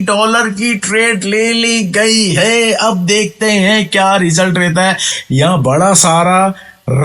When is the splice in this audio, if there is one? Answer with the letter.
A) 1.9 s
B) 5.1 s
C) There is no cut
B